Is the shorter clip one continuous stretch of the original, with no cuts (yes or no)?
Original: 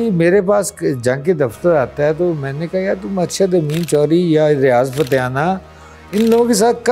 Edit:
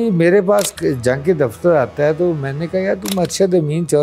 yes